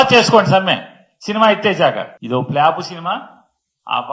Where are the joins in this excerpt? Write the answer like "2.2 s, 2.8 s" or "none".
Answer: 2.1 s